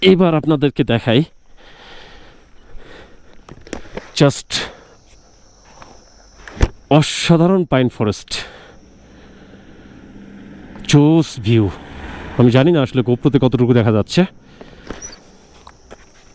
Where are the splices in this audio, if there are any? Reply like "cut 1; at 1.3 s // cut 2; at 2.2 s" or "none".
none